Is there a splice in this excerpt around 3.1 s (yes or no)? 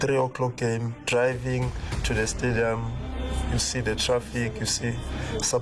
no